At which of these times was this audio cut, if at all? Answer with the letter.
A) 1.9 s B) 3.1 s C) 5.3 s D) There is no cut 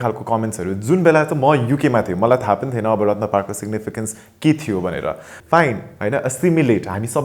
C